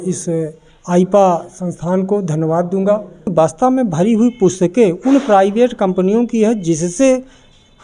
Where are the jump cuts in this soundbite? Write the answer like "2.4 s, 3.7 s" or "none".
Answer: 3.3 s